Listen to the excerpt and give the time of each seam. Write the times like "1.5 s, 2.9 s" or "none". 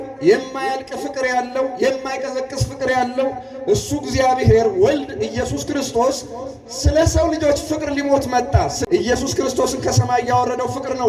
8.8 s